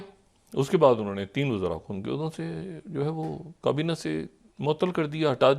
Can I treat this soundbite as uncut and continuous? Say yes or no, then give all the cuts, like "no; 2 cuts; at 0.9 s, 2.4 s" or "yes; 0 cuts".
yes; 0 cuts